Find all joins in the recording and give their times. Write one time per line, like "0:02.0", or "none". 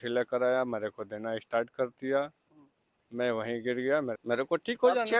0:04.2